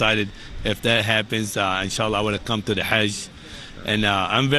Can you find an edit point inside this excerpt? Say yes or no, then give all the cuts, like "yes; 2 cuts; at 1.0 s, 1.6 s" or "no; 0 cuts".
yes; 1 cut; at 2.1 s